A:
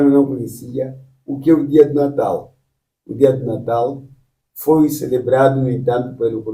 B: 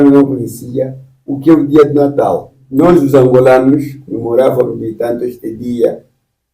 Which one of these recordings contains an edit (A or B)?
B